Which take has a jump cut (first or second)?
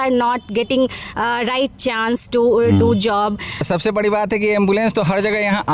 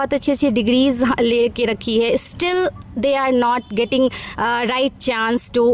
first